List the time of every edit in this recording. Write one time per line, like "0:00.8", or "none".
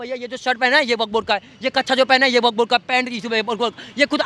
none